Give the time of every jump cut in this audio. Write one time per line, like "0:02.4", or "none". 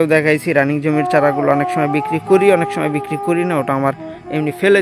none